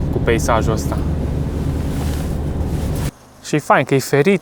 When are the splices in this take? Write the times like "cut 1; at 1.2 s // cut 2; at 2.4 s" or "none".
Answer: cut 1; at 3.1 s

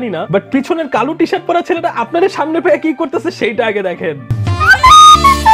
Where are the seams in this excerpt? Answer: none

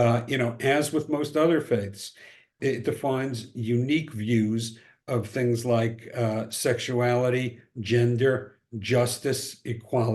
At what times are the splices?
cut 1; at 2.5 s

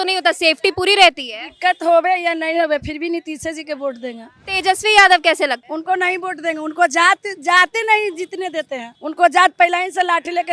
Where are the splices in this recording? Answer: cut 1; at 4.3 s

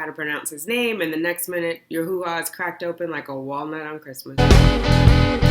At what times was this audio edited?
cut 1; at 4.4 s

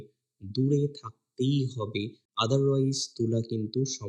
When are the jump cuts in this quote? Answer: none

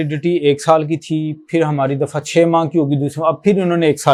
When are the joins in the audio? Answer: none

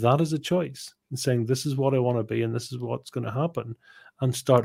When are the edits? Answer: none

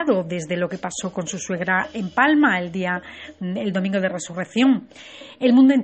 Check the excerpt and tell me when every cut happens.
cut 1; at 3.5 s

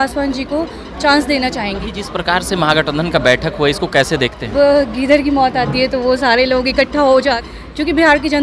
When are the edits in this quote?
cut 1; at 1.8 s // cut 2; at 4.5 s // cut 3; at 7.4 s

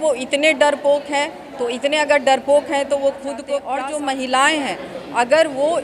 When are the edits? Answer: cut 1; at 3.6 s

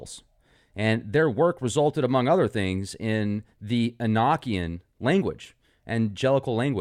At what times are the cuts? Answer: cut 1; at 1.1 s

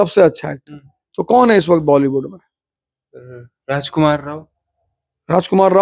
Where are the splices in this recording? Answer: none

